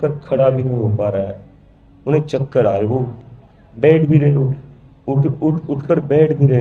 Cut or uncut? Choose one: uncut